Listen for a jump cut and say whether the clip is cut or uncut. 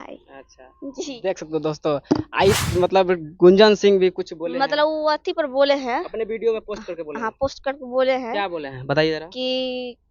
cut